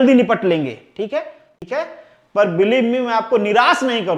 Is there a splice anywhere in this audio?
yes; 1 cut; at 1.6 s

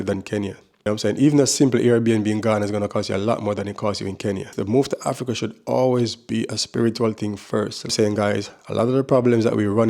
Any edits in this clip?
yes; 2 cuts; at 4.5 s, 7.9 s

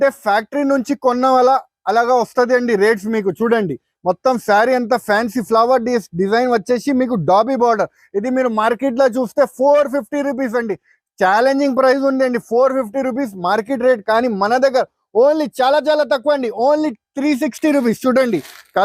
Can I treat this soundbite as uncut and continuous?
yes; 0 cuts

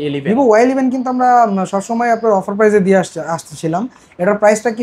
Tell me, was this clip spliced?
no; 0 cuts

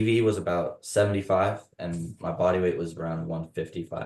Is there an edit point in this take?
no; 0 cuts

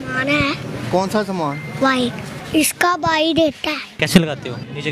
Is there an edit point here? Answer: yes; 2 cuts; at 2.3 s, 3.9 s

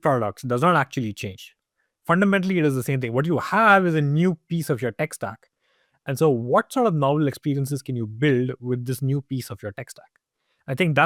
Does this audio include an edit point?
no; 0 cuts

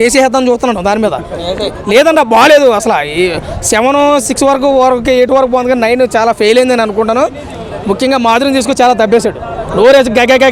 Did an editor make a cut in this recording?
no; 0 cuts

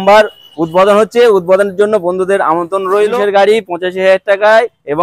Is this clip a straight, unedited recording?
no; 1 cut; at 3.1 s

